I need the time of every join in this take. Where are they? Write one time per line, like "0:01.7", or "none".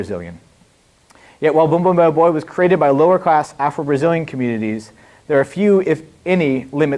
0:02.5